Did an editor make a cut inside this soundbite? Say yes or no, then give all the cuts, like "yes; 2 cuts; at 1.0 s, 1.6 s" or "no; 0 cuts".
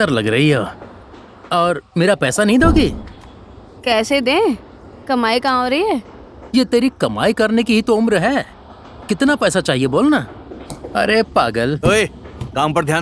no; 0 cuts